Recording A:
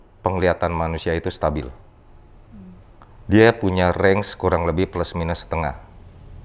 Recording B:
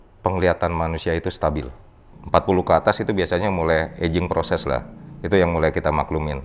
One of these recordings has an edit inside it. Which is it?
B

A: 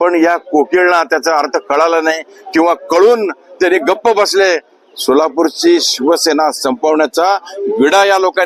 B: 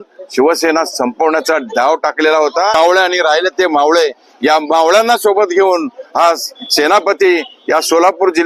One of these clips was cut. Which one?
B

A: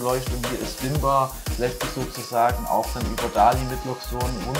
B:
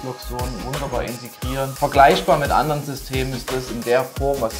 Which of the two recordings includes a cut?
B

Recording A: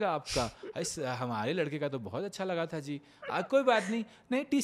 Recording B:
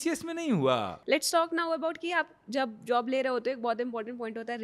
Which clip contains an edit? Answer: B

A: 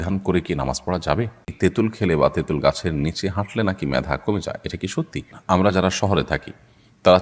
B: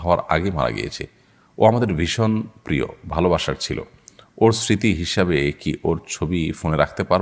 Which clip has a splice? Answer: A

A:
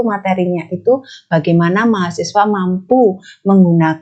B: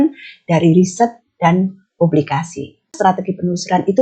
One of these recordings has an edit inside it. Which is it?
B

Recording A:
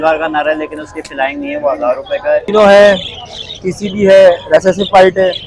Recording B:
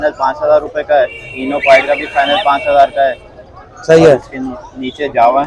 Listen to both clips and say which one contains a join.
A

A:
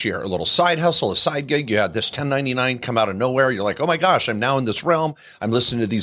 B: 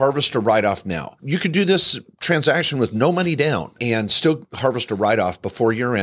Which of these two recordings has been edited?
B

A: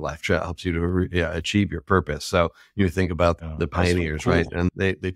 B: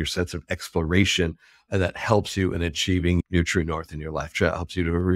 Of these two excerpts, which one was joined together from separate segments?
A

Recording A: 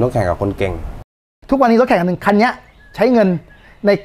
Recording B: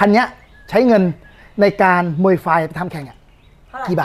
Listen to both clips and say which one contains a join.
A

